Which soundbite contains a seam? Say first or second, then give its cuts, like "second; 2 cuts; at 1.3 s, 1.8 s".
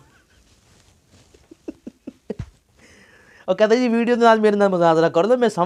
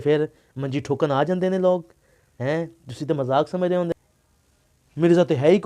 second; 1 cut; at 3.9 s